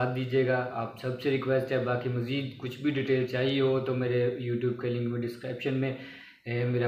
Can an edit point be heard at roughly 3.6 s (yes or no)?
no